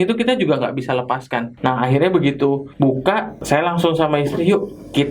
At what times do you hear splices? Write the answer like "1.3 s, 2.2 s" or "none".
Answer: 1.5 s, 2.9 s